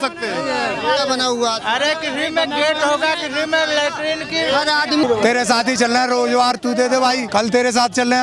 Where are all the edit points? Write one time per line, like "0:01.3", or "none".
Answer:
0:05.0
0:07.2